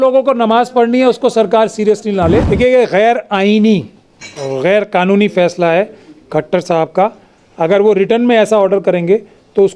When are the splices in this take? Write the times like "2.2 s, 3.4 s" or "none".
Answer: 2.5 s